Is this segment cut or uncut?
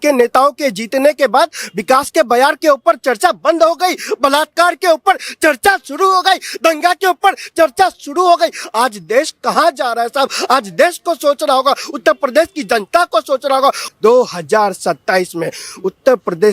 cut